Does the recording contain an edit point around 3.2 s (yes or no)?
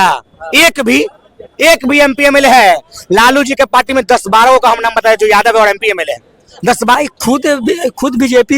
no